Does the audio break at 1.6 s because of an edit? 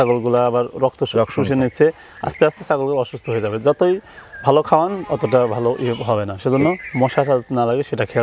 no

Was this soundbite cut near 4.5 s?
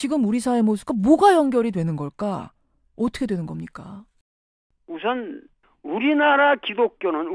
yes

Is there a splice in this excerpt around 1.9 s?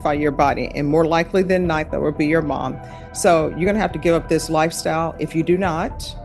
yes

